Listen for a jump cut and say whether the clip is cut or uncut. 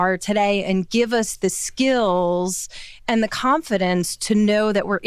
uncut